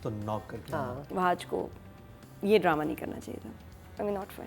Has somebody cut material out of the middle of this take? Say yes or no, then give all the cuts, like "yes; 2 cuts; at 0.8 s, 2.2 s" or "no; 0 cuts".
yes; 1 cut; at 1.0 s